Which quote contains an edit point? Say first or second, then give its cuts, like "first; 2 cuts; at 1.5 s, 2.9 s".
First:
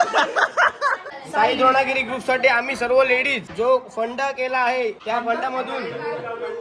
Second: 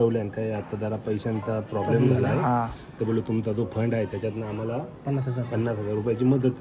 first; 3 cuts; at 1.1 s, 3.4 s, 5.0 s